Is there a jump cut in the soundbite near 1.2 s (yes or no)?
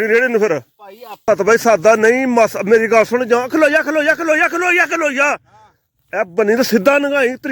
yes